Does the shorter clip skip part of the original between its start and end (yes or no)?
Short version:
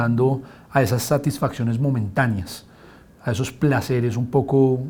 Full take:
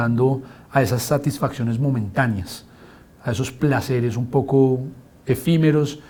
no